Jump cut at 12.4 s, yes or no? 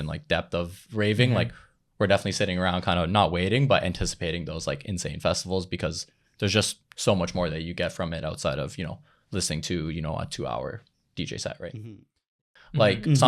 yes